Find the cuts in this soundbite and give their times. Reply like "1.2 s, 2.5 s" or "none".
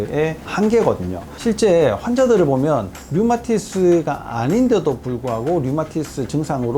1.3 s